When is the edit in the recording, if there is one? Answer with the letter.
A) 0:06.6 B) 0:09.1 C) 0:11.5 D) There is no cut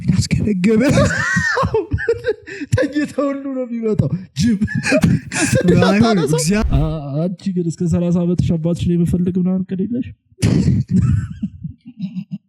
A